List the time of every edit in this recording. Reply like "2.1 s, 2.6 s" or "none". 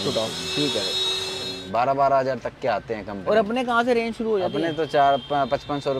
1.3 s